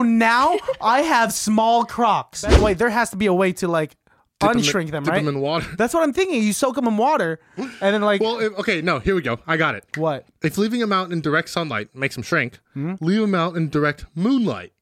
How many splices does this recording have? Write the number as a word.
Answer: one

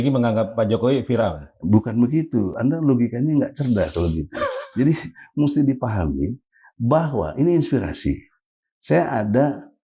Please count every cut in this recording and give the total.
zero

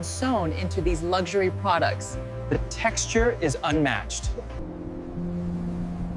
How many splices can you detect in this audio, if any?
one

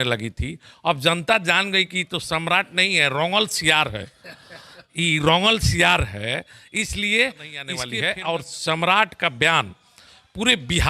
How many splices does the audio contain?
one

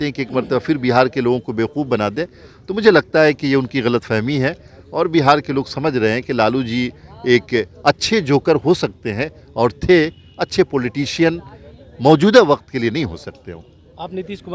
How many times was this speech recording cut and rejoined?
zero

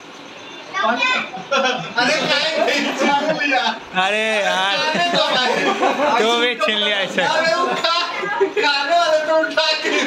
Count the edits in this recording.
zero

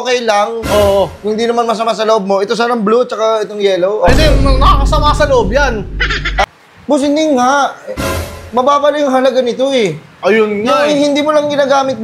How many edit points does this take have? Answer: one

